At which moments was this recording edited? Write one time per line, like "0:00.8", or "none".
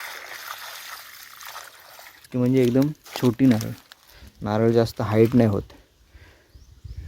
0:02.3